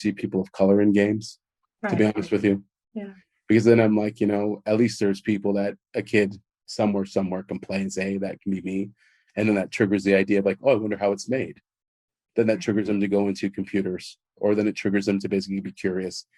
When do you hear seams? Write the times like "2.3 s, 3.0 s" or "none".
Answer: none

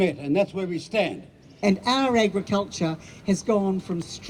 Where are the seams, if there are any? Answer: 1.5 s

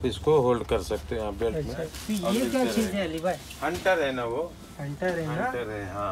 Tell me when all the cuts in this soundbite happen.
1.7 s

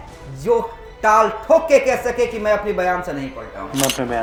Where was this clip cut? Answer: none

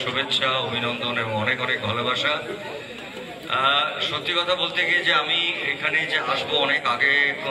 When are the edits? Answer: none

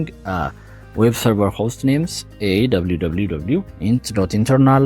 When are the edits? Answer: 3.7 s

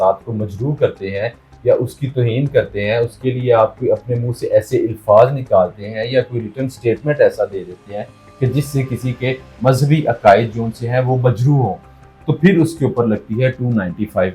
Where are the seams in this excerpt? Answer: none

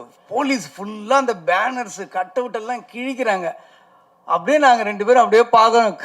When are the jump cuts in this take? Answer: none

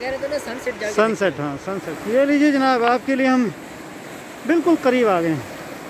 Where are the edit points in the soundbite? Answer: 1.7 s

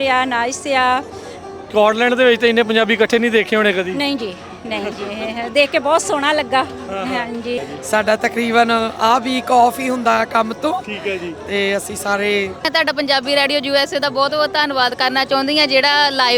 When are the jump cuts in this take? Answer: 1.5 s, 7.6 s, 12.7 s

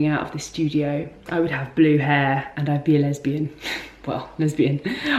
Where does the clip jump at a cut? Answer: 1.2 s, 2.5 s

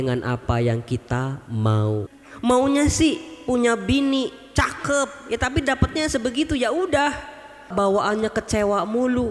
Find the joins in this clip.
2.2 s, 7.7 s

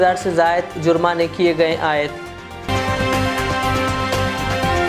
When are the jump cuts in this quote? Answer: none

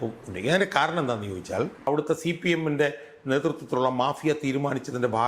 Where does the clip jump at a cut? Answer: 1.9 s

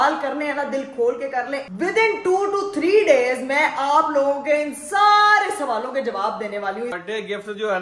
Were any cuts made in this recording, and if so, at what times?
1.7 s, 6.9 s

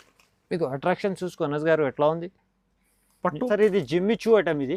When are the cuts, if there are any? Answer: 3.5 s

